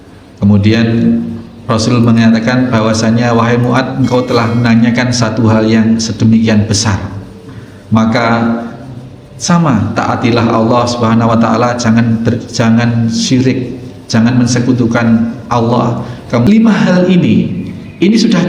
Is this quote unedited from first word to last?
no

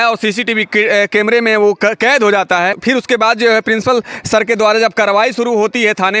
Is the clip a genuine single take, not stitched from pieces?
no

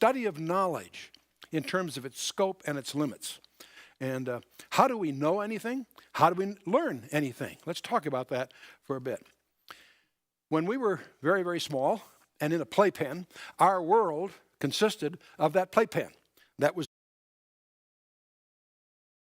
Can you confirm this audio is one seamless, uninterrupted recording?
yes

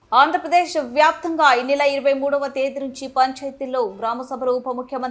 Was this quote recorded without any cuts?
yes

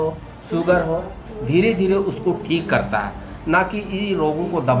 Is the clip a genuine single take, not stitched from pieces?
no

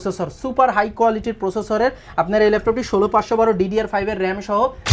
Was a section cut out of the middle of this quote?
no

